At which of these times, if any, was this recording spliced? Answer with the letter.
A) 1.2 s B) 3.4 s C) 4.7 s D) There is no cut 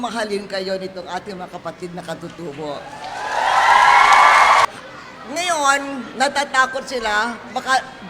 C